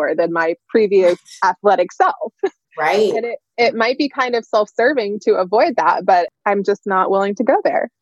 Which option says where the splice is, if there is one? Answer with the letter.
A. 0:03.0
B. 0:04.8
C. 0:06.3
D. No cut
C